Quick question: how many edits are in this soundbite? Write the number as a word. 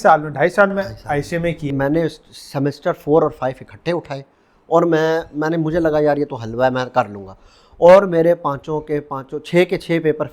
one